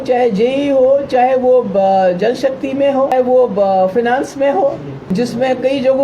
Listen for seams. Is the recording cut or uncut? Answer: cut